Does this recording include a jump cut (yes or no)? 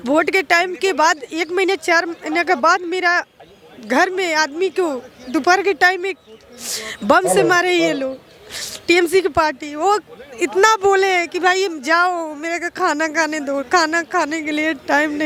no